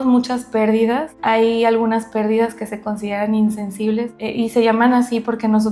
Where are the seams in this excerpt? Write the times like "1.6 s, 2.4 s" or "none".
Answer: 1.1 s, 4.2 s

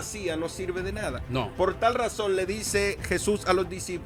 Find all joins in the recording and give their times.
none

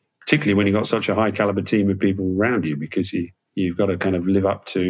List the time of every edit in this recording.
3.4 s

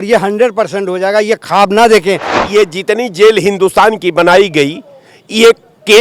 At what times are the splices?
2.3 s

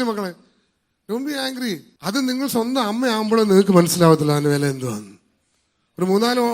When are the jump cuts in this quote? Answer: 1.9 s

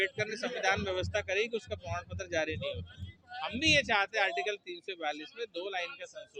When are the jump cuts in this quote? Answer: none

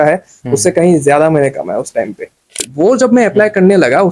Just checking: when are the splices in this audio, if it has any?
2.7 s

